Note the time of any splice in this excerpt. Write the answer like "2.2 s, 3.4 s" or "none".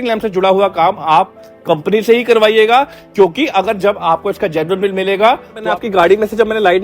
5.6 s